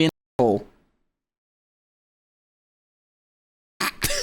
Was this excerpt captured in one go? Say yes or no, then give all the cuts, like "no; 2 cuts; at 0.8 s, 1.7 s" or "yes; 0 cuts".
yes; 0 cuts